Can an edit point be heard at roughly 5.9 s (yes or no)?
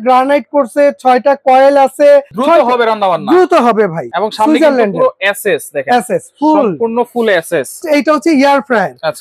no